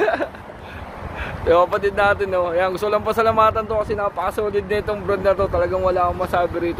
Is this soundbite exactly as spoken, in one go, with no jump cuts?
yes; 0 cuts

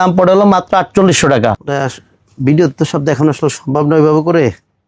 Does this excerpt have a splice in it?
yes; 1 cut; at 1.5 s

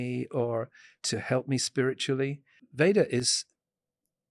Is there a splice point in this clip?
yes; 1 cut; at 2.6 s

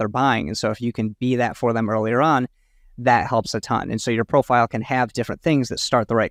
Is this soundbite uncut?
yes; 0 cuts

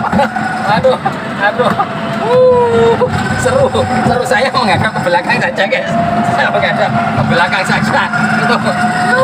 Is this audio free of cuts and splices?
yes; 0 cuts

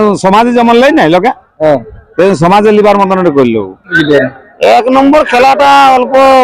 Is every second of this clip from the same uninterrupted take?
no; 1 cut; at 3.9 s

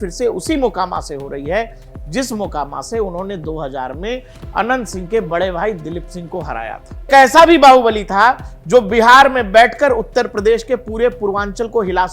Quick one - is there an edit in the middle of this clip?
yes; 1 cut; at 7.1 s

